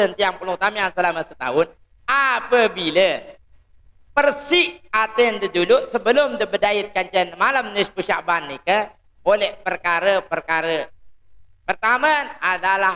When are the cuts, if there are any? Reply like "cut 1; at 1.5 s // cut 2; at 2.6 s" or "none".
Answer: none